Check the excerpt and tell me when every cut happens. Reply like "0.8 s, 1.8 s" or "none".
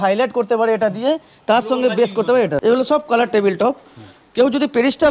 2.6 s